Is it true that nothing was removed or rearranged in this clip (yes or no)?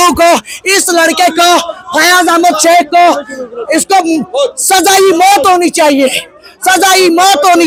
yes